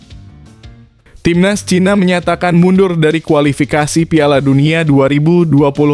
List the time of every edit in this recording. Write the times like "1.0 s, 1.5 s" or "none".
1.2 s